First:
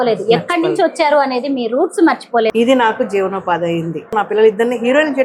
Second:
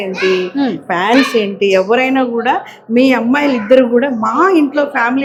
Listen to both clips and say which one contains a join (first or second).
first